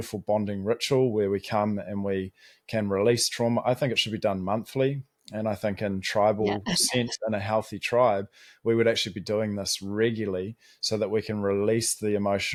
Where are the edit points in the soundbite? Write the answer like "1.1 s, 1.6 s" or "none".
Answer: none